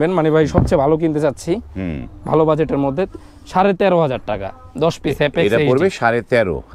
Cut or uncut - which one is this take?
uncut